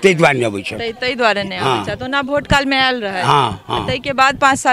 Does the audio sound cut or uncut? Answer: uncut